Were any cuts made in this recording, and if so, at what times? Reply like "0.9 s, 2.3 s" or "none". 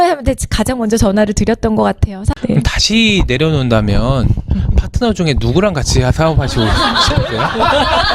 2.2 s